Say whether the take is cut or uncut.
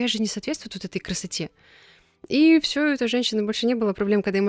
uncut